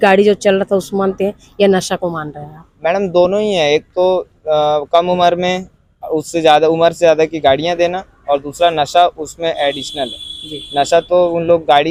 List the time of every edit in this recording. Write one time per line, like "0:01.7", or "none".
none